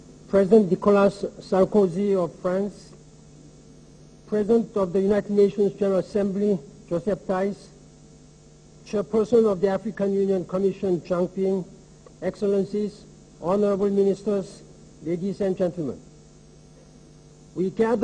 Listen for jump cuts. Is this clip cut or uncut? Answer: cut